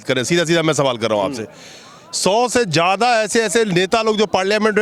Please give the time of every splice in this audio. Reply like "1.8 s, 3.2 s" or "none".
none